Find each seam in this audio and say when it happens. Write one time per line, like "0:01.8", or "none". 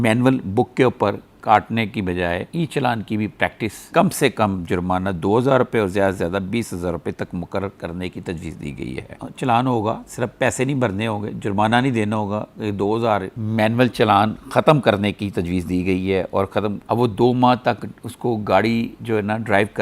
0:03.8
0:09.1
0:13.3
0:16.8